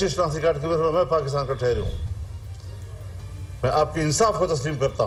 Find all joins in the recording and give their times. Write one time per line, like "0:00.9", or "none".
none